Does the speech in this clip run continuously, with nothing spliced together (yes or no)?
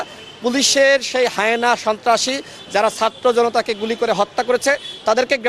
yes